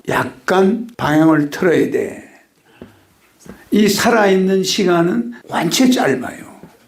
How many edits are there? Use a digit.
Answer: 0